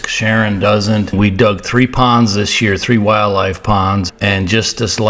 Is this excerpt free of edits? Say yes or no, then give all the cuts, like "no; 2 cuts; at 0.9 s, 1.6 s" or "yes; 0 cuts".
no; 2 cuts; at 1.1 s, 4.1 s